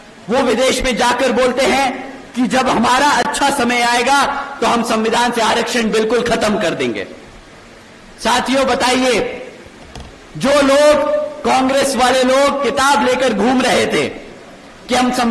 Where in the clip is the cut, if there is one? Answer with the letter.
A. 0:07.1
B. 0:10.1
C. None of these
C